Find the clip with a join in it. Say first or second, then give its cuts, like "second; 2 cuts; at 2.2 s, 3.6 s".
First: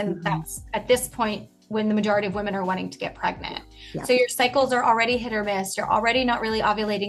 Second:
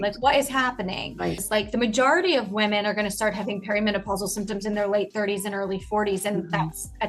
second; 1 cut; at 1.4 s